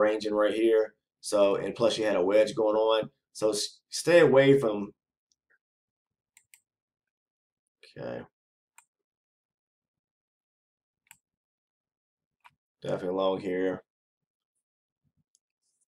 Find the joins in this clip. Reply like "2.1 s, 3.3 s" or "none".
5.6 s

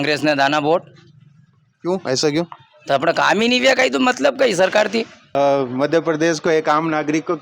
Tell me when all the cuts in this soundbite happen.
5.4 s

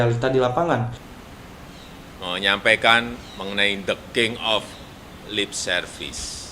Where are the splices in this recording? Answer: 1.0 s

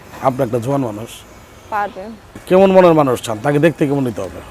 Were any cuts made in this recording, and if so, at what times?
2.4 s

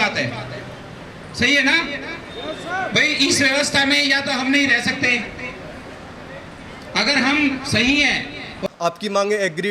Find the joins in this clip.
8.6 s

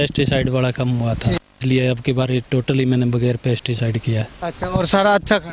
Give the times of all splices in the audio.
1.6 s

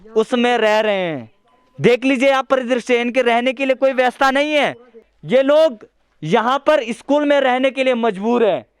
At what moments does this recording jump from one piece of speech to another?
5.1 s

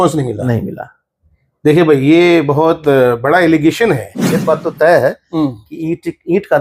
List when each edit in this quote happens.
4.4 s

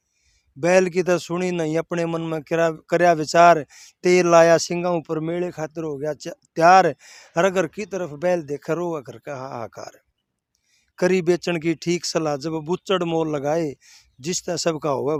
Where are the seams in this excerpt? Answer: none

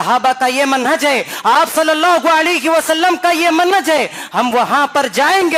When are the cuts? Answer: none

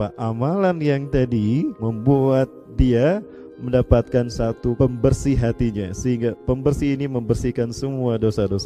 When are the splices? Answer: 1.8 s, 4.8 s

